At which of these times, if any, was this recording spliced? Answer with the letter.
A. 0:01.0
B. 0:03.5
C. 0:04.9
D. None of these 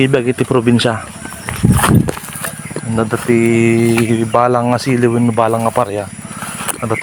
D